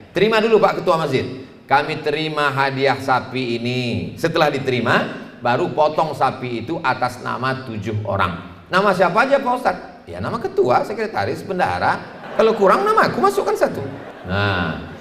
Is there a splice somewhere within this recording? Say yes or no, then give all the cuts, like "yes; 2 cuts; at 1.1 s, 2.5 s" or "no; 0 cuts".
yes; 2 cuts; at 12.2 s, 14.1 s